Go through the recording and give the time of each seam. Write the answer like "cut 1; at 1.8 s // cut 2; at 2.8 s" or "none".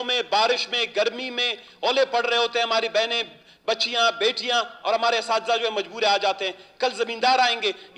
none